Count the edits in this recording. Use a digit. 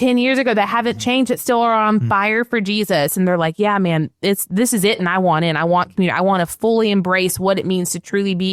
1